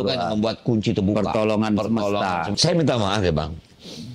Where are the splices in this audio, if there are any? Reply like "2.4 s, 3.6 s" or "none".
2.5 s